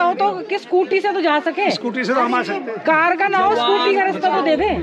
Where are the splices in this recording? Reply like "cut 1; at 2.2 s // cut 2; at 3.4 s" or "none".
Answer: none